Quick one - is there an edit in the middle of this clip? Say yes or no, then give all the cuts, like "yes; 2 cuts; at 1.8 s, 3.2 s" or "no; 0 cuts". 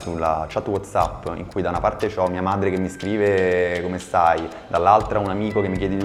no; 0 cuts